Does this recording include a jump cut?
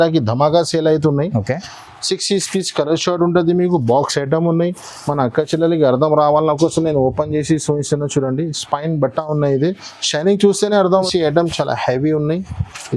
yes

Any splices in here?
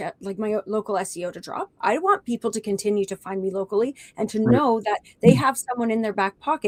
no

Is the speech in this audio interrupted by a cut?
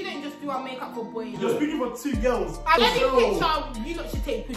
yes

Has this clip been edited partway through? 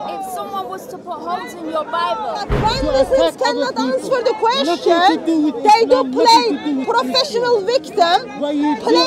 yes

